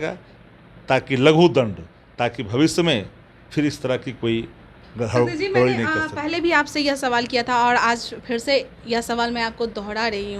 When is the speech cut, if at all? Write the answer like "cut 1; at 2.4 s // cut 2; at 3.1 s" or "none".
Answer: none